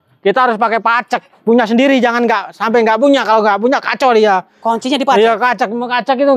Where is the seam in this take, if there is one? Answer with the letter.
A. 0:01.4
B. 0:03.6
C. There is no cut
C